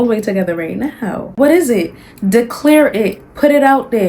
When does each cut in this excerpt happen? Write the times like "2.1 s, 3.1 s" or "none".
1.3 s